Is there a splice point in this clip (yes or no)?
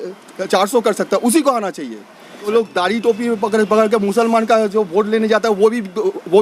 yes